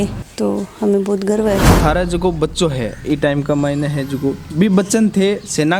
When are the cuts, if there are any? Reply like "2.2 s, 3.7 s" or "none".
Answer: 1.7 s